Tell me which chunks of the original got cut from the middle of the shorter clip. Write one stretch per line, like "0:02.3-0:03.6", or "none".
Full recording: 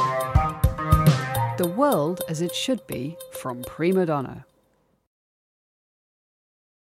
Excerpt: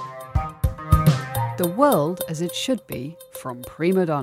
none